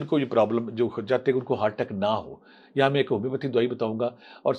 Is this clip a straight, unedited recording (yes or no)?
yes